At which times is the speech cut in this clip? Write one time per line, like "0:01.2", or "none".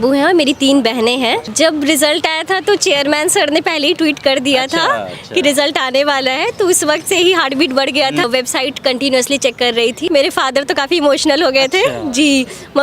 0:01.5
0:08.2
0:10.0